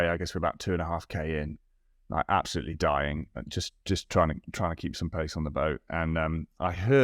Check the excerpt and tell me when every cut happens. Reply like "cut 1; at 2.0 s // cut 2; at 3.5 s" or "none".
none